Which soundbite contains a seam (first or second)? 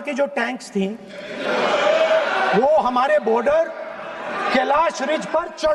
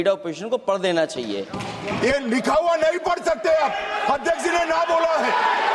second